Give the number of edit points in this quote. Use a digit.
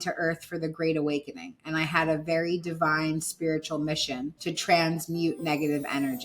0